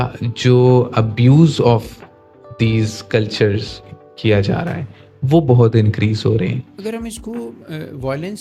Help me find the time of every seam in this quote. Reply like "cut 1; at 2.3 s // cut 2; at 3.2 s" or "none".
cut 1; at 6.7 s